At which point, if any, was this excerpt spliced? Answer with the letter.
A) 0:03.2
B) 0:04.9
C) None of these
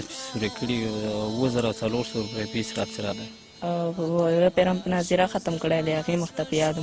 A